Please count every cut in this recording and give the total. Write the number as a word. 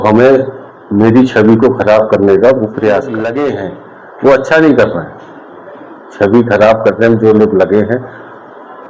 one